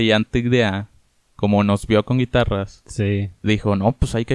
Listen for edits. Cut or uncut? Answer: uncut